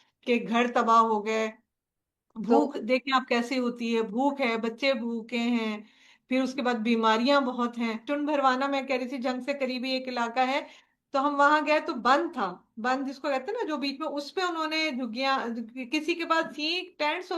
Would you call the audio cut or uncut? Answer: cut